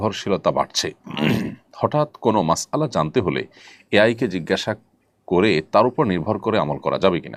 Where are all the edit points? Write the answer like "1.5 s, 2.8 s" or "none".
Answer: none